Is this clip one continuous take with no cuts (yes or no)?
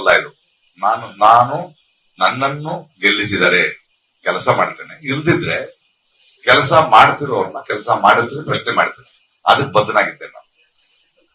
yes